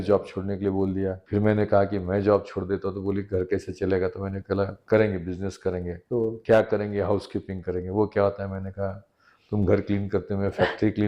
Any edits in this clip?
yes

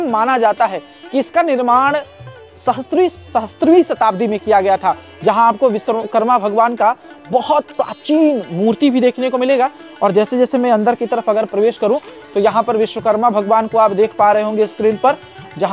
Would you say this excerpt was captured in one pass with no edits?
yes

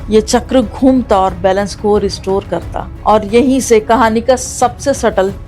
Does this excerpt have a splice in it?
yes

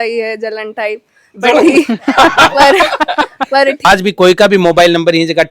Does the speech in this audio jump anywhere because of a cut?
yes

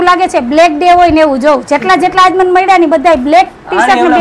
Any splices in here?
no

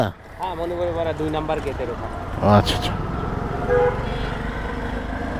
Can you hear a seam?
no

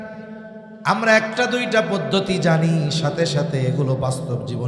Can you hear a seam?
no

